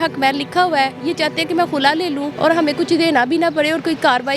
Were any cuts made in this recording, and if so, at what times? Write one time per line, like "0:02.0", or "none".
0:02.3